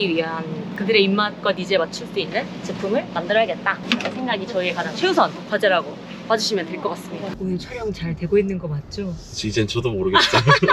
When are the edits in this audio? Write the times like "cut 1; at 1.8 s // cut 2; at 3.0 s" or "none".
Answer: cut 1; at 7.1 s